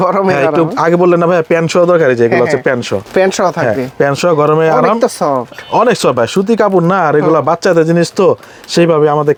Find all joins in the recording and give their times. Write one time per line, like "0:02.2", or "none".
none